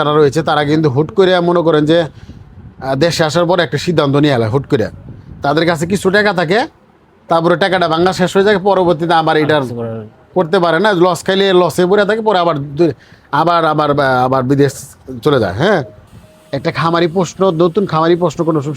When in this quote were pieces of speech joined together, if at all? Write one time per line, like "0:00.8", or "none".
0:15.9